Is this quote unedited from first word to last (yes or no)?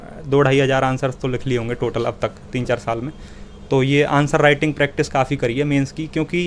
yes